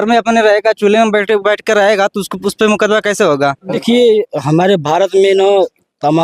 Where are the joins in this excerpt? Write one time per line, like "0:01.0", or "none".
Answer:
0:03.7